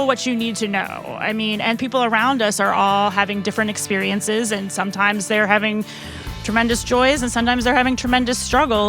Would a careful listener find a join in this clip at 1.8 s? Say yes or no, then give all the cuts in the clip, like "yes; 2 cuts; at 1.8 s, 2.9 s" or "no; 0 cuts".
yes; 1 cut; at 1.8 s